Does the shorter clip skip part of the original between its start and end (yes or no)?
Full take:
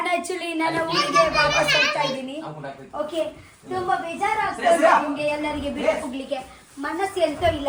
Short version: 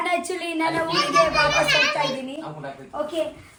no